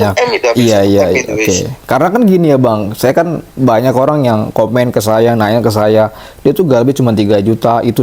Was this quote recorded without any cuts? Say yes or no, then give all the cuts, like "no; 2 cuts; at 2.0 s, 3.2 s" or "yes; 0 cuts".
yes; 0 cuts